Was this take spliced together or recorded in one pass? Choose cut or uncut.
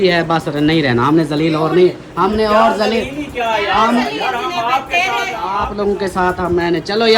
cut